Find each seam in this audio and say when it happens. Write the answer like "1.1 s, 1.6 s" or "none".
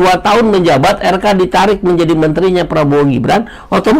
none